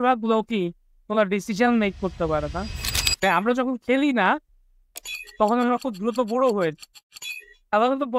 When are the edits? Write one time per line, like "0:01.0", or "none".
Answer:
0:03.2

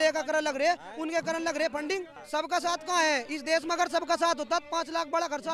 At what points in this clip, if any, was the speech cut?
0:02.2

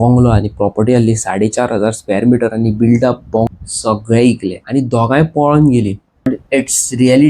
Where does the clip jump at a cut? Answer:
0:03.5
0:04.5
0:06.3

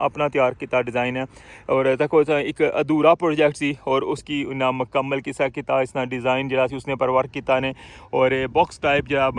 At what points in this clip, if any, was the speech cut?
none

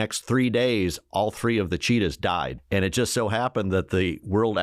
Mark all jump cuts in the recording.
0:02.6

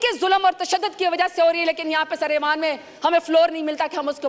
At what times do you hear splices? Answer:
none

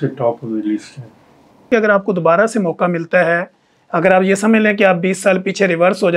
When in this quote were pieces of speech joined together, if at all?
0:01.7

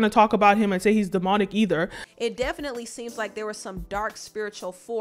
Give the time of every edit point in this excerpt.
0:02.0

